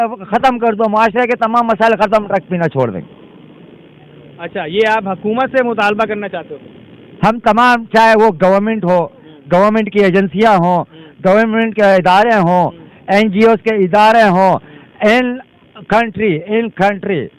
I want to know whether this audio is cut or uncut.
uncut